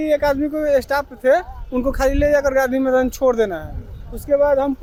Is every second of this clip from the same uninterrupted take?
yes; 0 cuts

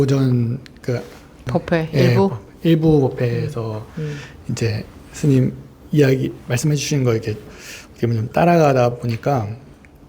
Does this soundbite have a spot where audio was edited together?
yes; 1 cut; at 1.5 s

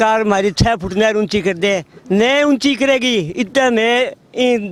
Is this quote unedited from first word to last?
yes; 0 cuts

